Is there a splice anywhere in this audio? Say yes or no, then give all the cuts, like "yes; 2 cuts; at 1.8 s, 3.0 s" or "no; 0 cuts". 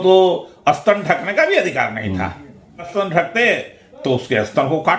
yes; 1 cut; at 2.9 s